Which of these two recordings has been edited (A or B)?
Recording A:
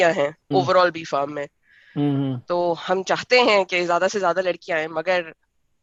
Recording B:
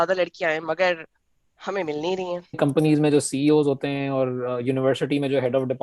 B